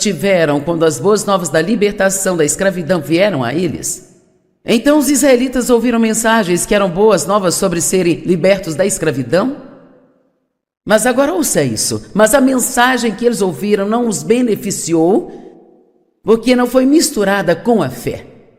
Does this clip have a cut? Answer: yes; 1 cut; at 17.5 s

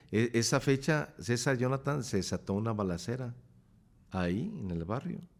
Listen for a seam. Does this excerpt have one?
no; 0 cuts

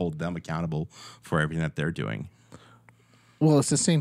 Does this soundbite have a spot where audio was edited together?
no; 0 cuts

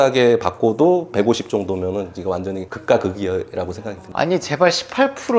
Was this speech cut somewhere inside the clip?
no; 0 cuts

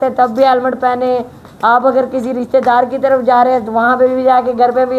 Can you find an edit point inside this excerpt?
no; 0 cuts

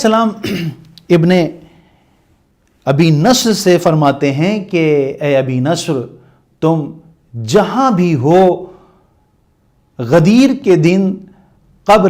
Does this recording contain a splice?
no; 0 cuts

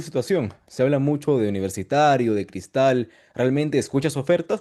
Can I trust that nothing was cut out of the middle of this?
yes; 0 cuts

